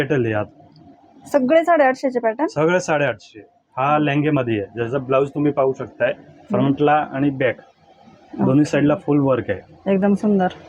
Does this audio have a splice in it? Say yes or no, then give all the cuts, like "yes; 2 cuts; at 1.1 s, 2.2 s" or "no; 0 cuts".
no; 0 cuts